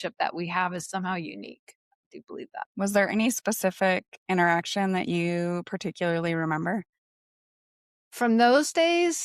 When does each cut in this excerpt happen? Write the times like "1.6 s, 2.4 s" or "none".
none